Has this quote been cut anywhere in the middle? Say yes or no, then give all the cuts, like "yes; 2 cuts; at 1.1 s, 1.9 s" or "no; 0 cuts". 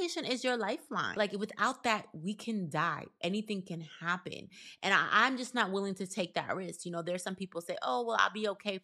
yes; 1 cut; at 1.2 s